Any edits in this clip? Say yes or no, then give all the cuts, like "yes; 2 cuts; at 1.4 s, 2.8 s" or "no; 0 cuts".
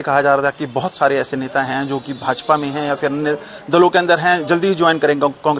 no; 0 cuts